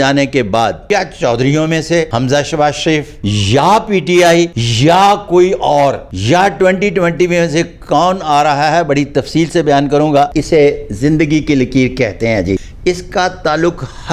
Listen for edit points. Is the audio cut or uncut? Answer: cut